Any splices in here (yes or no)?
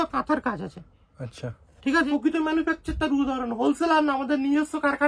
yes